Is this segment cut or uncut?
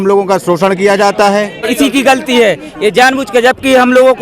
cut